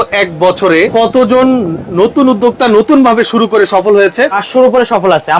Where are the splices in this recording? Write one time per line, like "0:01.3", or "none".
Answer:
0:00.9
0:04.4